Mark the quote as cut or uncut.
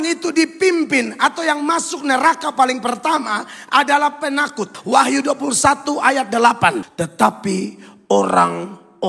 cut